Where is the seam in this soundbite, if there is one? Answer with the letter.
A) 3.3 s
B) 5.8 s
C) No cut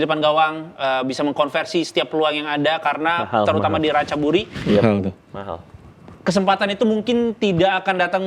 C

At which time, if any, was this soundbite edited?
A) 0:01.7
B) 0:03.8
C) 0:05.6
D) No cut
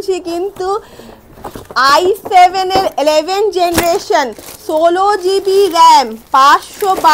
D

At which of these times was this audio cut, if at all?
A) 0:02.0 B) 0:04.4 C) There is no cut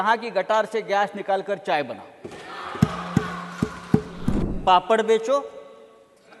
B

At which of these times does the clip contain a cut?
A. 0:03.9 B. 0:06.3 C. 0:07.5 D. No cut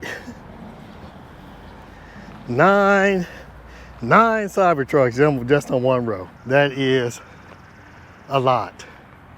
B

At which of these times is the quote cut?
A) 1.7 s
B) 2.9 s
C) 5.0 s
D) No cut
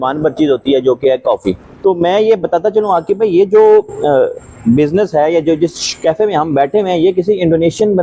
A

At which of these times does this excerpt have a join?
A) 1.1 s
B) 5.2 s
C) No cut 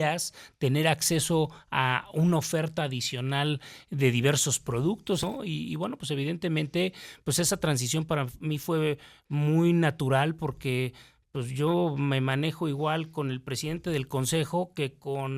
B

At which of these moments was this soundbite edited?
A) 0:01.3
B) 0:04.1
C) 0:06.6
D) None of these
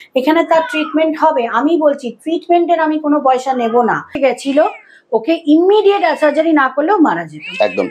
B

